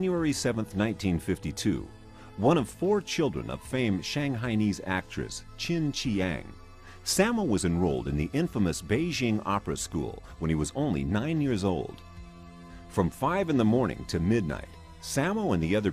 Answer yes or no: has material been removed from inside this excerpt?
no